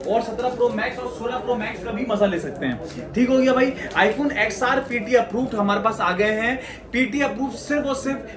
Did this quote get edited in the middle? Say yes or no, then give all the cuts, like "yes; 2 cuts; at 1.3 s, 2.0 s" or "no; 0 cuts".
no; 0 cuts